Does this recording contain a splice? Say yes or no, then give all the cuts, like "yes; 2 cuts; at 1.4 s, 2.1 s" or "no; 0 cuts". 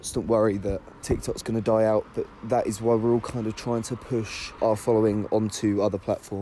yes; 2 cuts; at 0.9 s, 4.4 s